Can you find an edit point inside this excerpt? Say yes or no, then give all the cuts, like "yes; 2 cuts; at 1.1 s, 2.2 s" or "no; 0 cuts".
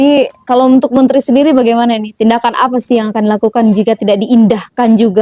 no; 0 cuts